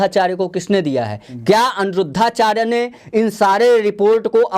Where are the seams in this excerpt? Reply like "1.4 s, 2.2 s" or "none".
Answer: none